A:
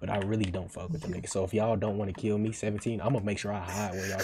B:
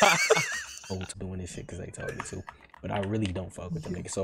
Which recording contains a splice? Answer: B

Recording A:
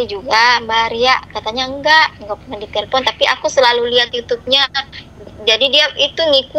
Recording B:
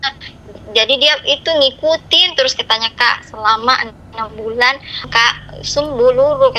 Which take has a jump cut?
B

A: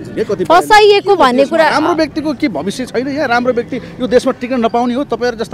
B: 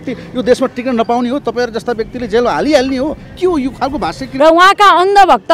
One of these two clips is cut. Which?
B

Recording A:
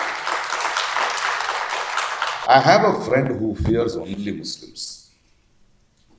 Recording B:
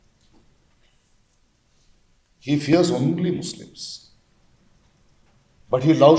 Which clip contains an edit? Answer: A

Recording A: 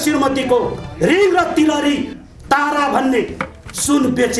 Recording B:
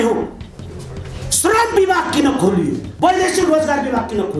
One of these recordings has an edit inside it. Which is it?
B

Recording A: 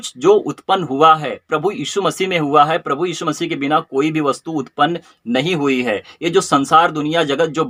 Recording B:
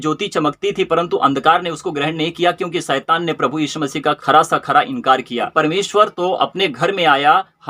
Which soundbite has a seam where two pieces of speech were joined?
B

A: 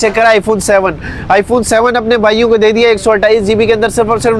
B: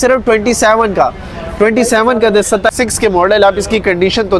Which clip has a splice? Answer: B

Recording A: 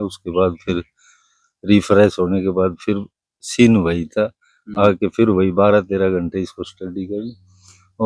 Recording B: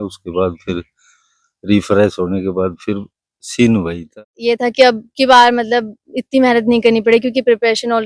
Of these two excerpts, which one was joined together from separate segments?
B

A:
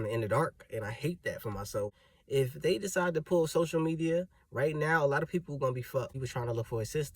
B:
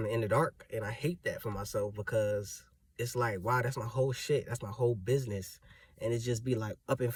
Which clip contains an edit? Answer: A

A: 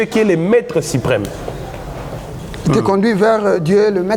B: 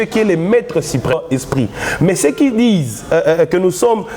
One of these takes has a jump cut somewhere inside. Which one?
B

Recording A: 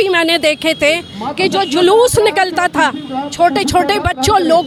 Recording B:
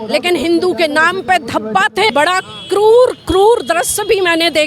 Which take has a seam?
B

